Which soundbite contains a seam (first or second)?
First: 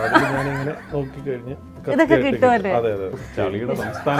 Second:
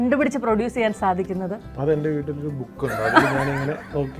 first